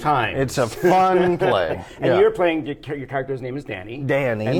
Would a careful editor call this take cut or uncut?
uncut